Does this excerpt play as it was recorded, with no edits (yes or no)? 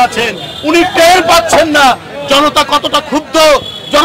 yes